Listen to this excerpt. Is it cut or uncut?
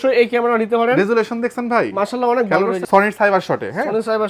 cut